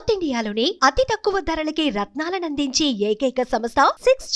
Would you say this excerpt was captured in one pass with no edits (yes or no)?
yes